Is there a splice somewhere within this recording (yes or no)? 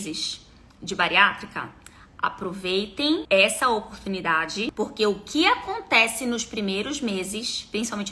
yes